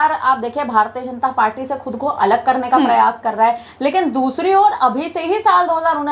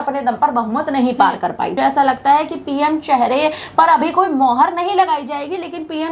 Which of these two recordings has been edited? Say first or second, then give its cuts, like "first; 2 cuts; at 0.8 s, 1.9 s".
second; 1 cut; at 1.8 s